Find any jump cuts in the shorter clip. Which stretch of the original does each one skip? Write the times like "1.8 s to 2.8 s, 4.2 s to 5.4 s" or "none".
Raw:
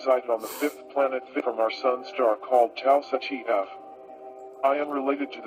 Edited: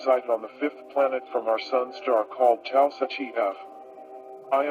1.3 s to 1.4 s

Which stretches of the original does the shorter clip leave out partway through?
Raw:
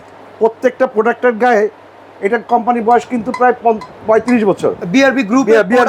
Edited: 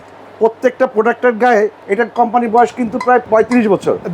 1.8 s to 2.1 s, 3.6 s to 4.0 s

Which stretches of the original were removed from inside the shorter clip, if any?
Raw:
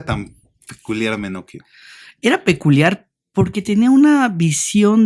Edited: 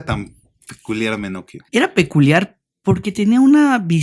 1.5 s to 2.0 s

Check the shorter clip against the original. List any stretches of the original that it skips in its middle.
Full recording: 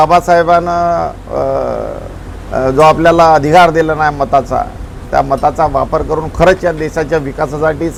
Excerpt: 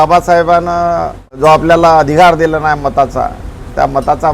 1.3 s to 2.7 s

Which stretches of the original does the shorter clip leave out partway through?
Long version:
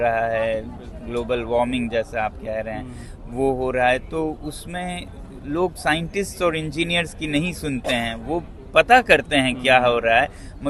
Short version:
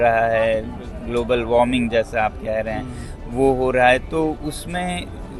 none

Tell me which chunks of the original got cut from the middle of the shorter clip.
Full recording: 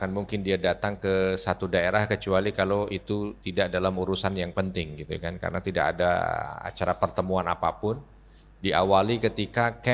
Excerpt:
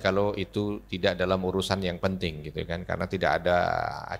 none

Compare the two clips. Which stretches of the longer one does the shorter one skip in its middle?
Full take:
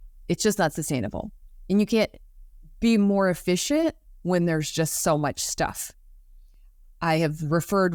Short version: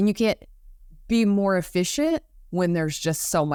none

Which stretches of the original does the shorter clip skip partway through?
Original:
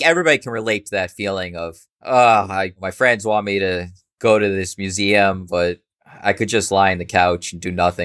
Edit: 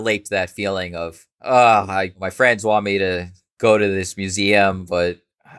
none

